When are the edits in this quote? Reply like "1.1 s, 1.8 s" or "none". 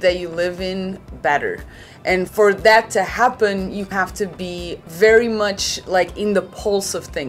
3.9 s